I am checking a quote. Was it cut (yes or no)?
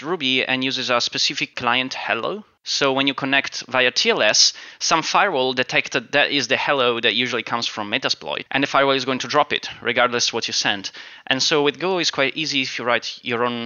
yes